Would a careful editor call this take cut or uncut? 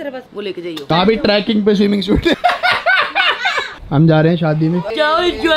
cut